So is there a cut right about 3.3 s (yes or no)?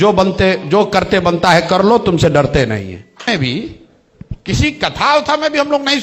yes